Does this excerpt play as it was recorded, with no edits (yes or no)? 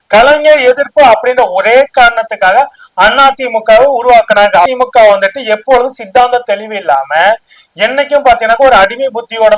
no